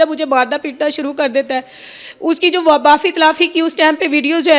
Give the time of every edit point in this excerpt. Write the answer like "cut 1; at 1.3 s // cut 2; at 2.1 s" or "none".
none